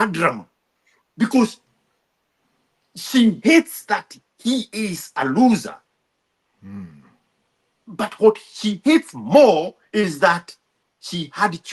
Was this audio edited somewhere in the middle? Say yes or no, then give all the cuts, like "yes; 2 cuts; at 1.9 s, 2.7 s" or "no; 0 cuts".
no; 0 cuts